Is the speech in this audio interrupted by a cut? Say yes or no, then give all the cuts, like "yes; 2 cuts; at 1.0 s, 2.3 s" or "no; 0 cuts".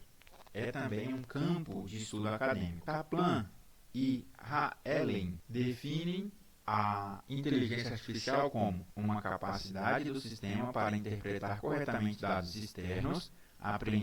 yes; 3 cuts; at 2.8 s, 5.4 s, 8.9 s